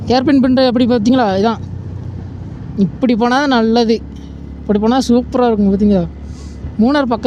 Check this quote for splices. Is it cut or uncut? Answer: uncut